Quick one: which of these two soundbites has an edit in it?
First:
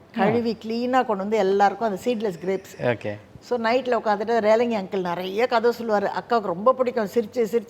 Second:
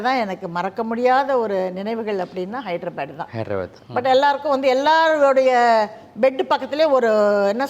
second; 1 cut; at 3.8 s

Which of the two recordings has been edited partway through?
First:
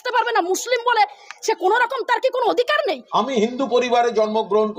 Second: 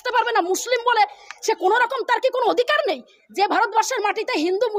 first; 1 cut; at 3.0 s

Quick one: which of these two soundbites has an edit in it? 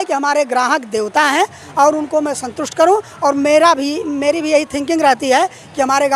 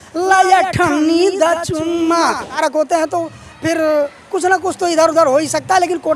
second; 1 cut; at 2.6 s

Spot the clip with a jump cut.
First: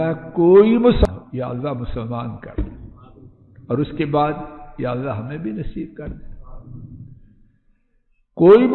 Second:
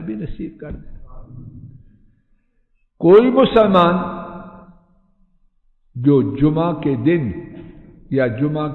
first; 1 cut; at 1.1 s

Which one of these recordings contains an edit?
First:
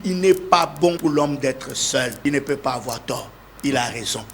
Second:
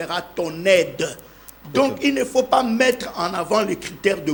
first; 2 cuts; at 1.0 s, 2.2 s

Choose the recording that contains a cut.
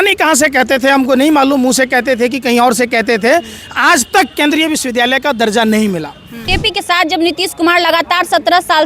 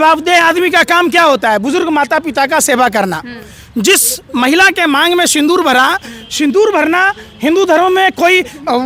first; 1 cut; at 6.5 s

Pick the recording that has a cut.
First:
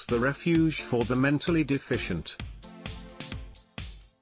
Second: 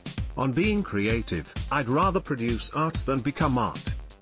first; 1 cut; at 2.3 s

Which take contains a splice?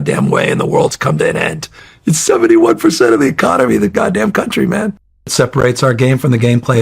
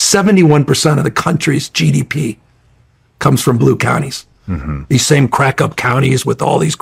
first; 1 cut; at 5.6 s

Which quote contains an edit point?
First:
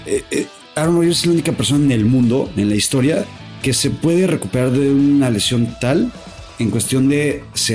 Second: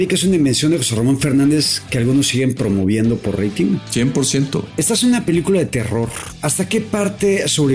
second; 3 cuts; at 3.9 s, 4.7 s, 6.5 s

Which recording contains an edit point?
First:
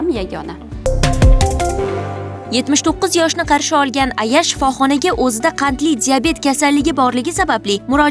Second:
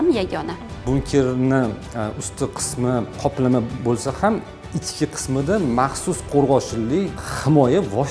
second; 3 cuts; at 0.8 s, 3.1 s, 7.2 s

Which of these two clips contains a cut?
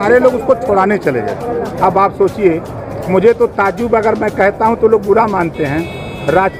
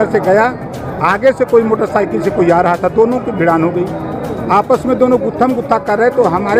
first; 1 cut; at 1.8 s

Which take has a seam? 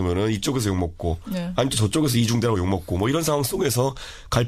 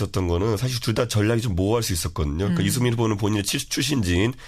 second; 1 cut; at 2.6 s

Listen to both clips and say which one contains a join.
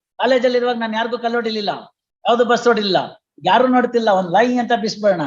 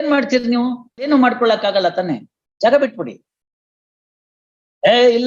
second; 1 cut; at 1.1 s

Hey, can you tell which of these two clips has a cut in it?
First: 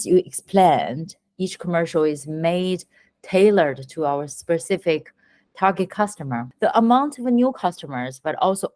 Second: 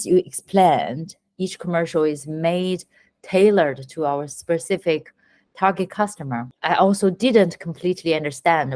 first; 1 cut; at 6.5 s

